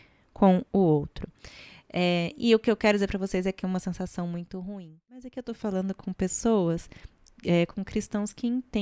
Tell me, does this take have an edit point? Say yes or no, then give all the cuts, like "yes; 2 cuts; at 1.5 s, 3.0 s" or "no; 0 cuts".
yes; 1 cut; at 5.3 s